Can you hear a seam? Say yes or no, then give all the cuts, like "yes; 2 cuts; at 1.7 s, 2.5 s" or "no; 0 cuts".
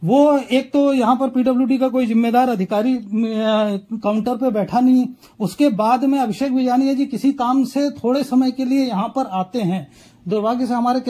no; 0 cuts